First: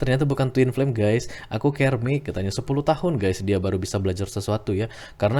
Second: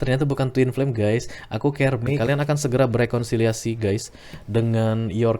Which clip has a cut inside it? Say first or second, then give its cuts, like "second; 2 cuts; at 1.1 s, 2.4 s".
second; 1 cut; at 2.2 s